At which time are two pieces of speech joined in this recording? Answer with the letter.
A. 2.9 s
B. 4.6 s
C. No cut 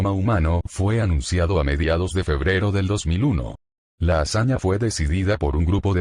B